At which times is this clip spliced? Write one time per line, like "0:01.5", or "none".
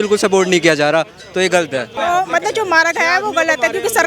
0:01.9